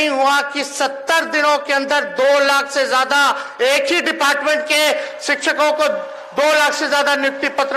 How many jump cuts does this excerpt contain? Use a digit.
0